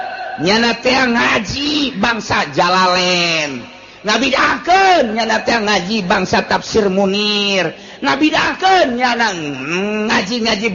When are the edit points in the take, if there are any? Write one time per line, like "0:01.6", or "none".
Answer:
none